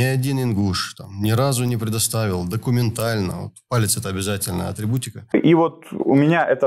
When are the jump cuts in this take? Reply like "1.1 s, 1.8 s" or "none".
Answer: 5.3 s

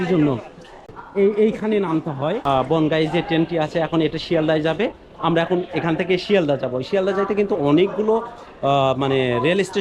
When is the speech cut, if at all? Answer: 1.0 s, 2.4 s

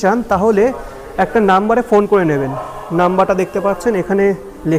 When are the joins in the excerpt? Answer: none

